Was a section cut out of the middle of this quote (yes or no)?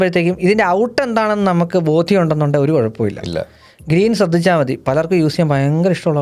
no